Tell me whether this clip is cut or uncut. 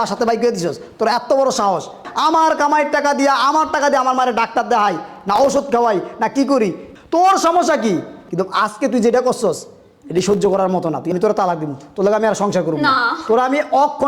cut